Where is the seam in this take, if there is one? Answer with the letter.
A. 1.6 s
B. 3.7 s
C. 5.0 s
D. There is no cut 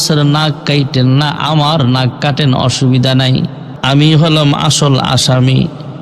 B